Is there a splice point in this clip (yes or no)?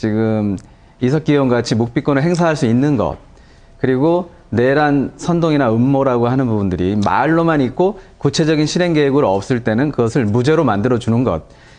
yes